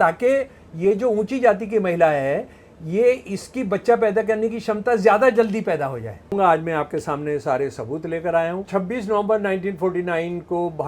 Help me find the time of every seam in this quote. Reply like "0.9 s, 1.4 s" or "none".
6.3 s, 8.7 s